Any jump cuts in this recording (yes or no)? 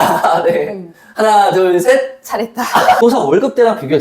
yes